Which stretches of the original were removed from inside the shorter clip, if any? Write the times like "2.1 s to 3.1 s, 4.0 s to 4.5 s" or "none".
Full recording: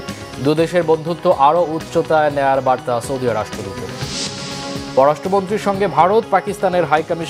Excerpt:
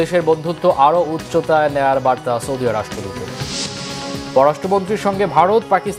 none